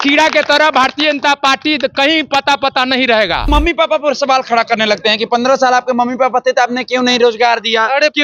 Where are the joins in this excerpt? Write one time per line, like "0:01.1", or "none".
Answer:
0:03.5